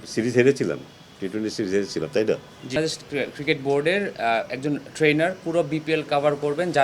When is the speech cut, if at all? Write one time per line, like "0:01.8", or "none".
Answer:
0:02.8